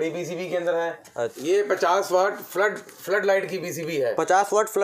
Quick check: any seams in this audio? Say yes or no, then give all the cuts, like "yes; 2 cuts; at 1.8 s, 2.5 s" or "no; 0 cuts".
yes; 1 cut; at 1.3 s